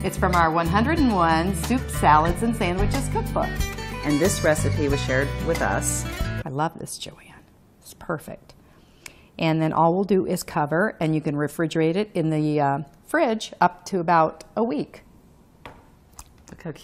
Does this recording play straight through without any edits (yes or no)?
yes